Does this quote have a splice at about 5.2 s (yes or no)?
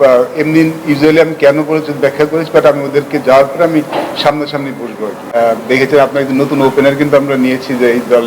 yes